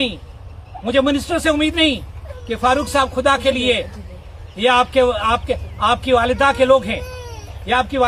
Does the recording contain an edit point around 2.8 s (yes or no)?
no